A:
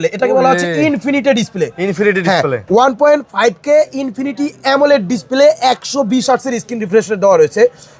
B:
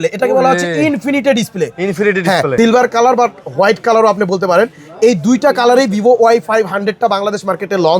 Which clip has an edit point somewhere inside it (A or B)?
B